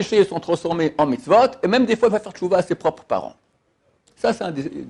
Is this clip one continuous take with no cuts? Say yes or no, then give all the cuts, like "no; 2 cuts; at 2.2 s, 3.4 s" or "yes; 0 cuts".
yes; 0 cuts